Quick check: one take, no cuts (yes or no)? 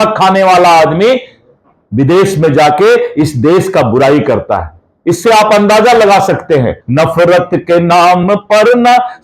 no